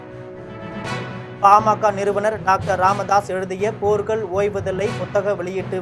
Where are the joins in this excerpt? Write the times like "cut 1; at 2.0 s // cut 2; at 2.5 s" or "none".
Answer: cut 1; at 1.0 s